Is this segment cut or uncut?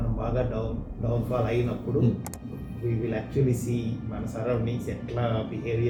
uncut